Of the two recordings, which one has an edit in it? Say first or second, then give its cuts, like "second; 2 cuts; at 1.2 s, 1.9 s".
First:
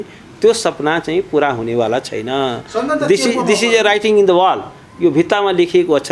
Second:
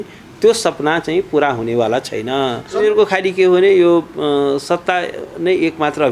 second; 1 cut; at 2.8 s